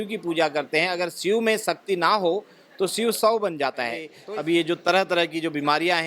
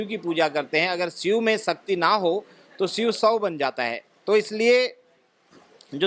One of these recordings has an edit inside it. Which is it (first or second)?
first